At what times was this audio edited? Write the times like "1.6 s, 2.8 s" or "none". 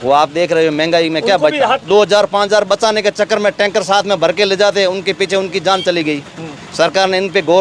1.8 s